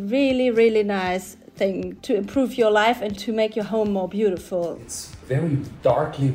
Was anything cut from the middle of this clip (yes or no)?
yes